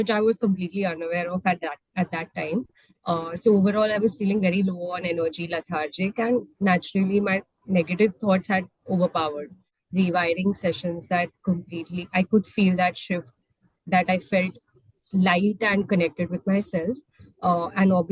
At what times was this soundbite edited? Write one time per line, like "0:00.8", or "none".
0:09.7